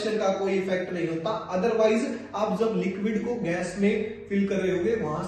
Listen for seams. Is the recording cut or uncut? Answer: uncut